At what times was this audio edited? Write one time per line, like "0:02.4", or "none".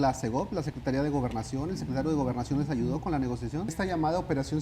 0:03.7